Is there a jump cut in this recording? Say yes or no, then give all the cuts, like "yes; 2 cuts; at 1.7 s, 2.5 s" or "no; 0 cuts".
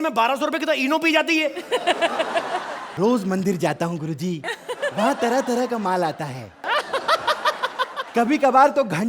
yes; 1 cut; at 2.8 s